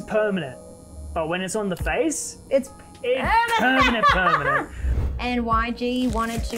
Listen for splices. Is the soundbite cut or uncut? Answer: cut